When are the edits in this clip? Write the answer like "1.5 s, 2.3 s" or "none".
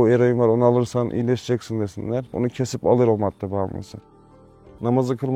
2.3 s, 4.3 s